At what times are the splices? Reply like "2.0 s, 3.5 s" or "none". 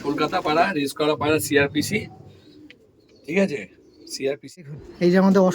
4.6 s